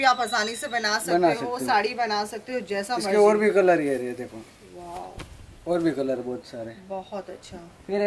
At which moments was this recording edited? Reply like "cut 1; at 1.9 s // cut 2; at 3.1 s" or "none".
none